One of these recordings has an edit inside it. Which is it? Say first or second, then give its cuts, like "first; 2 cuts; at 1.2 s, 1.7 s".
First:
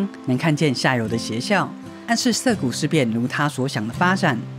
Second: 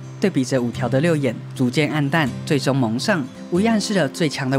second; 1 cut; at 3.3 s